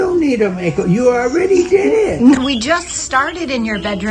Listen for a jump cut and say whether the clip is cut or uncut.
cut